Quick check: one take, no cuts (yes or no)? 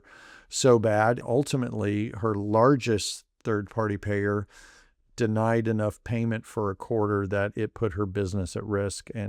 no